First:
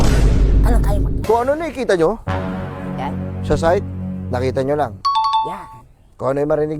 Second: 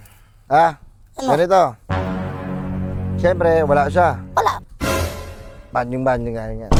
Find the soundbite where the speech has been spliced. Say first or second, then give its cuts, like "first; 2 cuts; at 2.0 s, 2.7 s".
first; 1 cut; at 1.2 s